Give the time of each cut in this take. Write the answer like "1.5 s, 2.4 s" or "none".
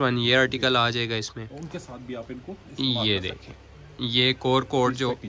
1.4 s